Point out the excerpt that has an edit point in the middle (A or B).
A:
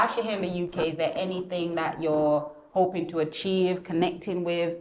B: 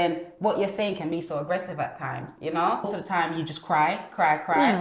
B